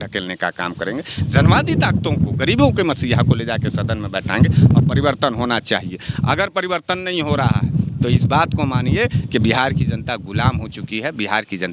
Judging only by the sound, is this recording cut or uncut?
uncut